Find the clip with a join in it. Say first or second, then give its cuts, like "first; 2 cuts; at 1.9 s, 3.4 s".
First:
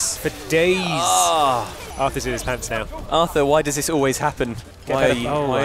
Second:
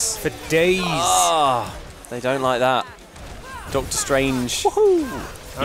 first; 3 cuts; at 1.8 s, 3.0 s, 4.7 s